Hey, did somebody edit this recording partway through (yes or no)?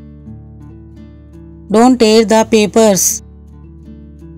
yes